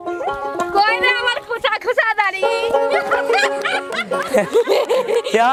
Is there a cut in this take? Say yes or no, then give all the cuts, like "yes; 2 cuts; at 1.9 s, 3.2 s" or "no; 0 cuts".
no; 0 cuts